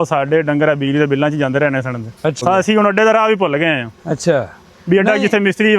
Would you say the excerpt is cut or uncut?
cut